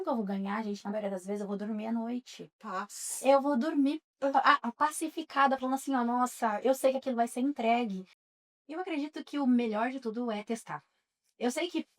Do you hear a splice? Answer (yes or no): yes